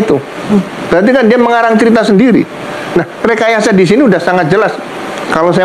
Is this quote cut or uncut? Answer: uncut